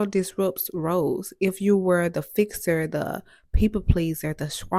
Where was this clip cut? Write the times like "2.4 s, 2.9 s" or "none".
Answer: none